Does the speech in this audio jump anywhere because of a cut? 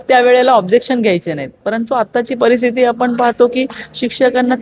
no; 0 cuts

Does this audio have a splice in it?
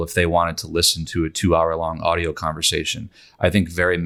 no; 0 cuts

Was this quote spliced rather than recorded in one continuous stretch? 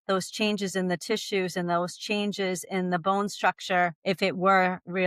no; 0 cuts

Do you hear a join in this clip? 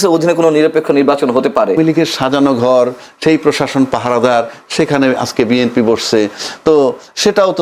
yes; 1 cut; at 1.8 s

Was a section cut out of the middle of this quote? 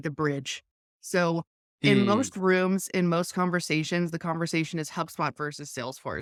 no; 0 cuts

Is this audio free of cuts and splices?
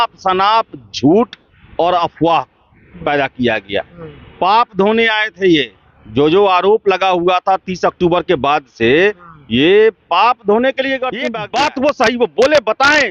no; 1 cut; at 11.3 s

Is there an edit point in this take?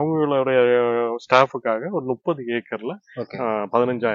no; 0 cuts

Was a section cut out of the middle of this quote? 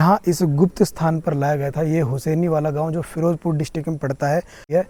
no; 0 cuts

